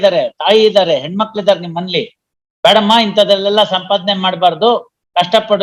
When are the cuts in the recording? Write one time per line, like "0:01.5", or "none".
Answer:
none

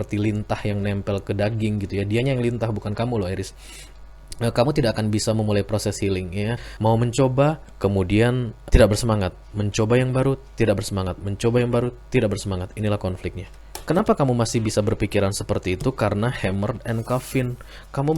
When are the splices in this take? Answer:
0:06.6
0:13.7

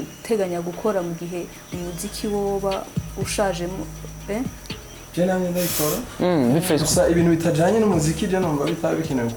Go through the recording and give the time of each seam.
none

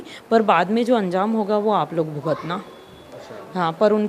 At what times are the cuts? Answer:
none

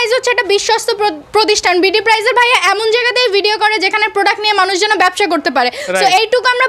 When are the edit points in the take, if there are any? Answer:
none

